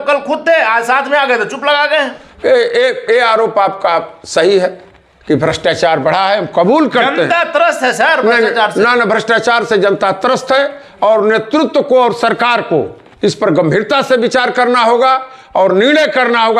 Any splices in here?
no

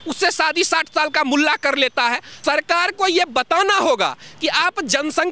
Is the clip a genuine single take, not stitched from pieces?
no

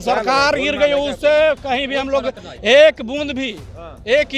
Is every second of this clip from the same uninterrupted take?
yes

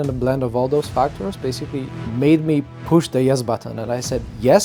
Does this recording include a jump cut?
yes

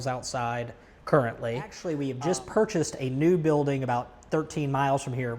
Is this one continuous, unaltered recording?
no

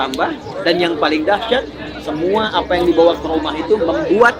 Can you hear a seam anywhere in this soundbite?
no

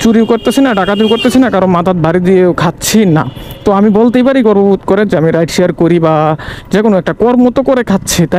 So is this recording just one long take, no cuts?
yes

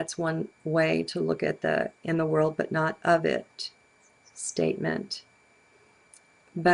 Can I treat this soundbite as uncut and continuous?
yes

